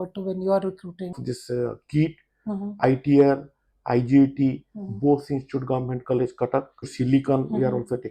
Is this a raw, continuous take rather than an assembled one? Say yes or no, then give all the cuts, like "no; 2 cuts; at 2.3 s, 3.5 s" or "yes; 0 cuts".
no; 2 cuts; at 1.2 s, 6.9 s